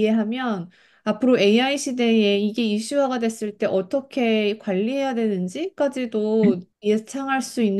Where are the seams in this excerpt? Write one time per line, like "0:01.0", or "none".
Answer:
0:06.7